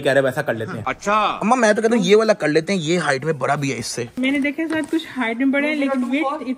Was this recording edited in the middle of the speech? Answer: yes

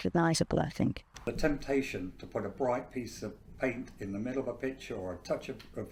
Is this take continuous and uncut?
yes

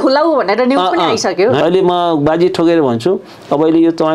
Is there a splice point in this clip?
yes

